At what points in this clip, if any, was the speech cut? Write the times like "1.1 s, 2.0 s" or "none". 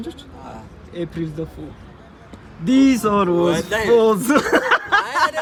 none

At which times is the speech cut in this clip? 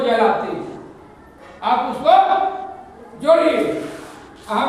none

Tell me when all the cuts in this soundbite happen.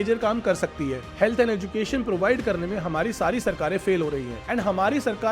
1.0 s, 4.4 s

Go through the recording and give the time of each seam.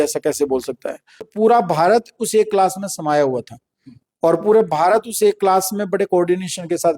1.3 s

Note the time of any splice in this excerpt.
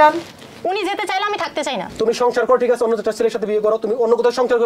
1.9 s

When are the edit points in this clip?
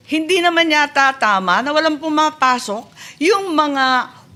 none

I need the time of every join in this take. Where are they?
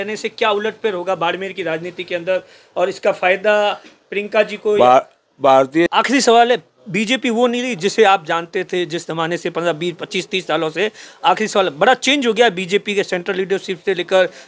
5.9 s

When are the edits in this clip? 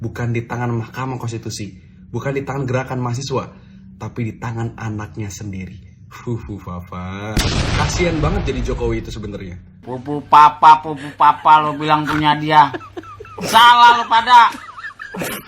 9.8 s

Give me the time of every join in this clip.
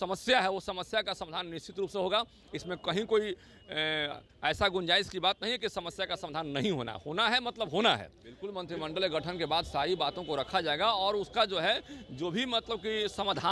8.5 s

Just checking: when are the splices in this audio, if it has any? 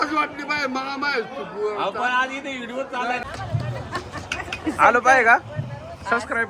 3.2 s

